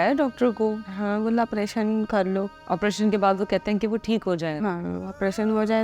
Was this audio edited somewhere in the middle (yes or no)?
yes